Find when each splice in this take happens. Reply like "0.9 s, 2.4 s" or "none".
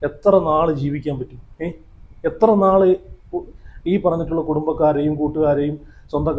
none